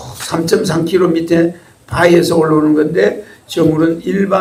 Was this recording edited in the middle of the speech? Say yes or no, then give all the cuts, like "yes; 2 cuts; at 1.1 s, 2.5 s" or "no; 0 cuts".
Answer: no; 0 cuts